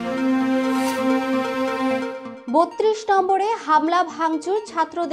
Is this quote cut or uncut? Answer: uncut